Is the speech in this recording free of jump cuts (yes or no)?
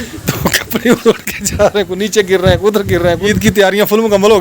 no